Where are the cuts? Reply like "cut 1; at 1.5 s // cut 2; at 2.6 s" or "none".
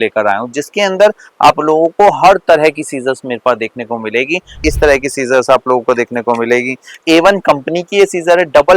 cut 1; at 4.6 s // cut 2; at 7.0 s